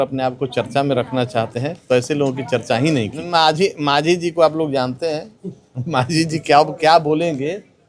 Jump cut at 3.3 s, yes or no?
yes